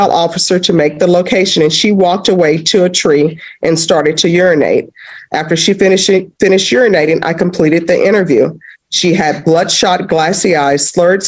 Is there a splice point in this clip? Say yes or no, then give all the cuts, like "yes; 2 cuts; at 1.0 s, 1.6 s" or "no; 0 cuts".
no; 0 cuts